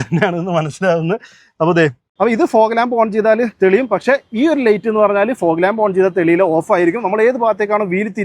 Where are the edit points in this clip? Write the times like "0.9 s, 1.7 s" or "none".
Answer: 2.1 s